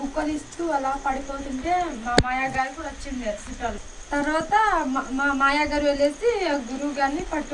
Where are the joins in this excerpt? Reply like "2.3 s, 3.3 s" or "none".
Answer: 3.8 s